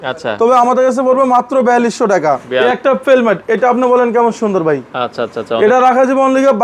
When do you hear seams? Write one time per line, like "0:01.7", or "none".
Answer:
0:02.5